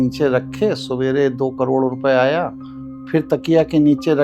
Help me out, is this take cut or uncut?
uncut